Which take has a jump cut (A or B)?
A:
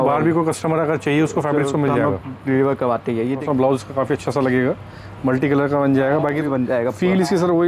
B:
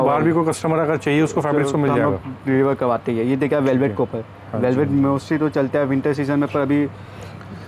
A